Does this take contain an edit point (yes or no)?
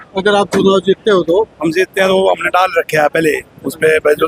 no